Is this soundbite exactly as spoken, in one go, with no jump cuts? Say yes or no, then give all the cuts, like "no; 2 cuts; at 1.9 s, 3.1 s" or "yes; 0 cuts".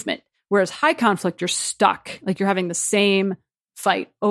yes; 0 cuts